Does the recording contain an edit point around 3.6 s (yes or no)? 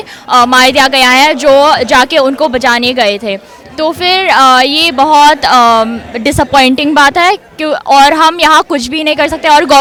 no